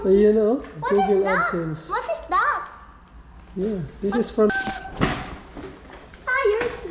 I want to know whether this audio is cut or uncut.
cut